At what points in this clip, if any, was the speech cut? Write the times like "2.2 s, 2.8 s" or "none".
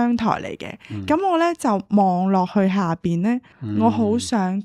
3.6 s